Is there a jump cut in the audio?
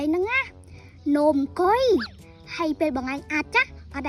no; 0 cuts

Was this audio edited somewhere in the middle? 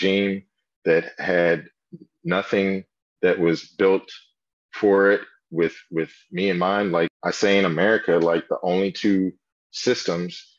yes; 1 cut; at 7.1 s

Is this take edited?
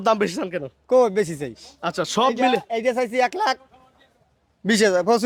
no; 0 cuts

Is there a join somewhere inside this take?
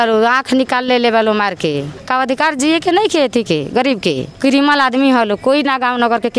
no; 0 cuts

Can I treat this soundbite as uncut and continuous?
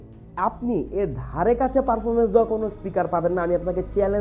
yes; 0 cuts

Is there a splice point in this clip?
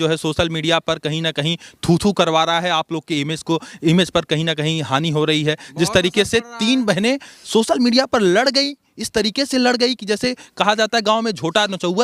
no; 0 cuts

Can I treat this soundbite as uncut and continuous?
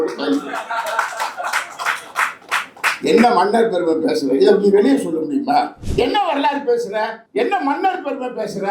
no; 1 cut; at 5.8 s

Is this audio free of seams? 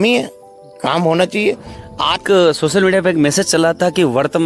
no; 1 cut; at 2.2 s

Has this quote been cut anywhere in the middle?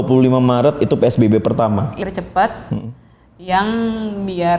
yes; 1 cut; at 1.9 s

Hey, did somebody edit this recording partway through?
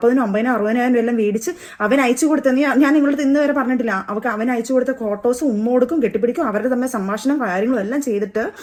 no; 0 cuts

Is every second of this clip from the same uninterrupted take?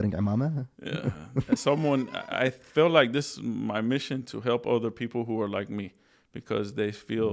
yes; 0 cuts

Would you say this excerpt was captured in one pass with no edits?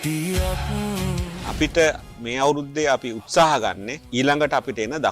no; 1 cut; at 1.1 s

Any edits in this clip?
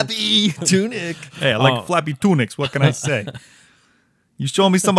yes; 1 cut; at 1.2 s

